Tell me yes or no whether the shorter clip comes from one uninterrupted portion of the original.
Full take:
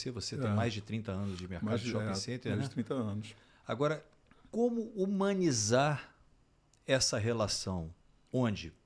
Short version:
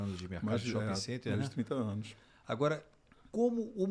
yes